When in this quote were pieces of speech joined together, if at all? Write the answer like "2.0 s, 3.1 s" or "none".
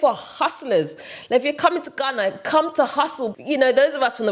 3.4 s